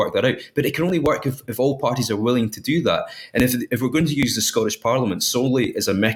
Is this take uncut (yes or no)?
yes